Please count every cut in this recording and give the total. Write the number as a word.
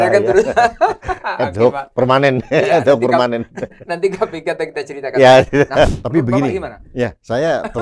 one